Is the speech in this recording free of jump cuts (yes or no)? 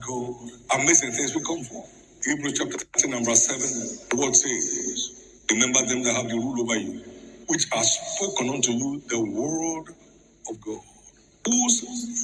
no